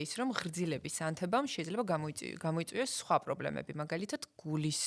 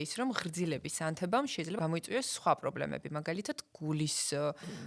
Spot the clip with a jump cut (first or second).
second